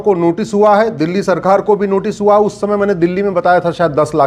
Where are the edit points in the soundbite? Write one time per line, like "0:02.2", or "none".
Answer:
none

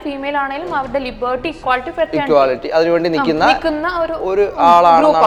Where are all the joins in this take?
none

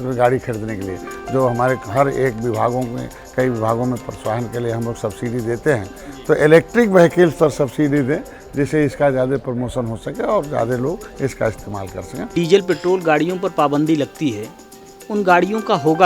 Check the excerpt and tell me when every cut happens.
0:12.3

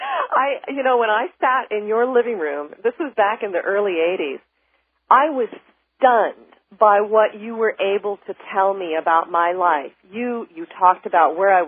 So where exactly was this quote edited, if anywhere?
none

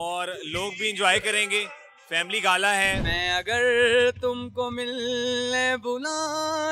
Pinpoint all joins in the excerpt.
0:03.0

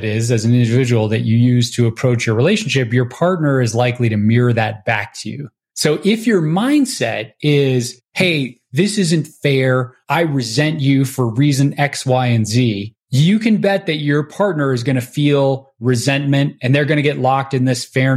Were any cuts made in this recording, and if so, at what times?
none

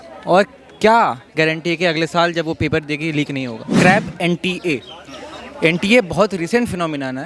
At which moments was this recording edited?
0:03.7

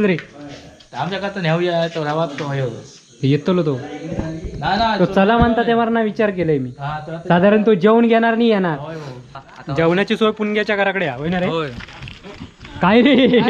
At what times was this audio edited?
0:09.2

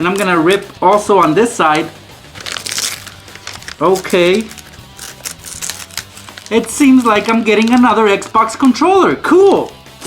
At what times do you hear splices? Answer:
none

